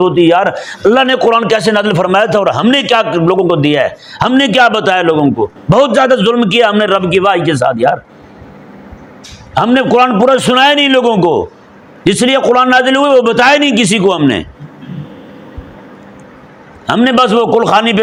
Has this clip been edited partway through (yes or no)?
no